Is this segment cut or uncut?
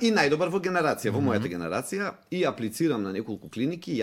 uncut